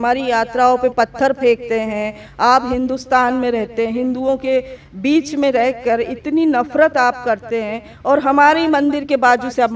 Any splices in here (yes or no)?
no